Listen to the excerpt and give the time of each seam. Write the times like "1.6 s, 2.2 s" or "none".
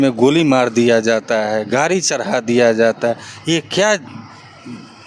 none